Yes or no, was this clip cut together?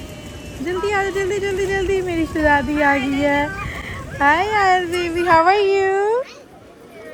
no